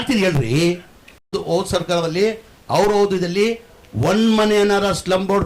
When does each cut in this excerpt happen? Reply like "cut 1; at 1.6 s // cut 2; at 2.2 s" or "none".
cut 1; at 1.3 s